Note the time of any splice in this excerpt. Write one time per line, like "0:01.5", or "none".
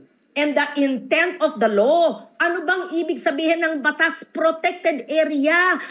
none